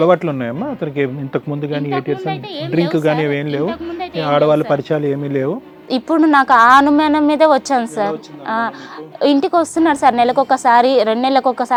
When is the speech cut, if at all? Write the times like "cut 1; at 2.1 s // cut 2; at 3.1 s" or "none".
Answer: none